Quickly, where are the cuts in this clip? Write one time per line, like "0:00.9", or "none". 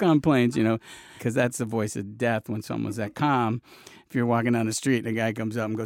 0:01.2